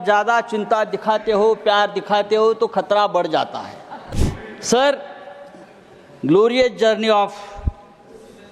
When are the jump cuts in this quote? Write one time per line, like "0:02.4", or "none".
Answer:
0:04.0